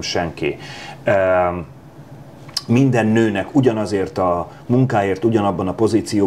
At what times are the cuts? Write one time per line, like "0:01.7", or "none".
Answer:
none